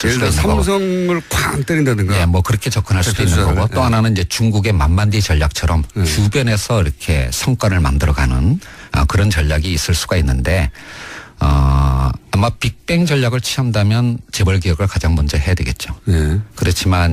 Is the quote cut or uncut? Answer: cut